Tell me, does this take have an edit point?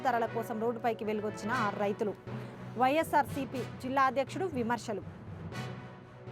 no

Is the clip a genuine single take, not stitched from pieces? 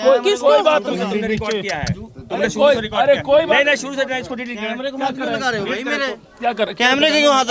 yes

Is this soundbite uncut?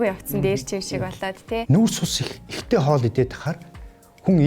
no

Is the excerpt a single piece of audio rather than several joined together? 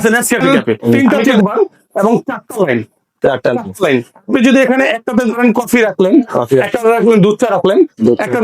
no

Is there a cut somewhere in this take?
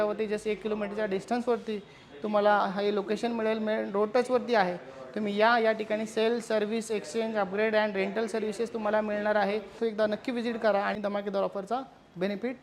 yes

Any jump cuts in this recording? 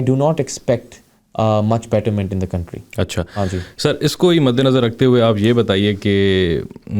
no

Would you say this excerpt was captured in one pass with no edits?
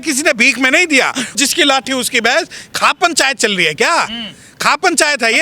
no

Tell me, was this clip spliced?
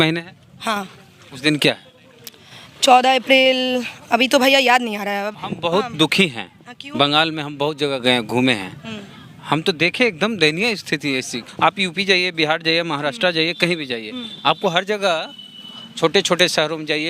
yes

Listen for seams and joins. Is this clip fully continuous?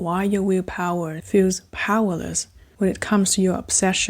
no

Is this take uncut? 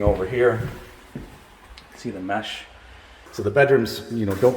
no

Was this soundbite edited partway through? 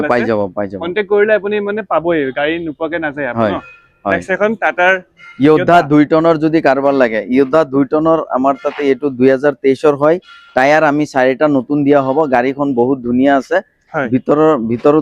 no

